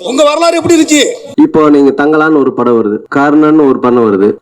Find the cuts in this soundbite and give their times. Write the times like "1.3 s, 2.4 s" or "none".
1.3 s